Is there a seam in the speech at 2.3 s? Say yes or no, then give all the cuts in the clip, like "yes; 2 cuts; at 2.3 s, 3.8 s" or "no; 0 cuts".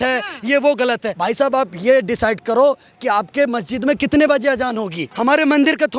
no; 2 cuts; at 1.1 s, 5.1 s